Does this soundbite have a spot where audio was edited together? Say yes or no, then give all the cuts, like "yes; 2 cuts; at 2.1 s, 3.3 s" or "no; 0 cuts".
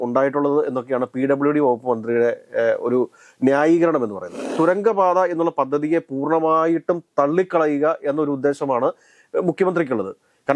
yes; 1 cut; at 4.5 s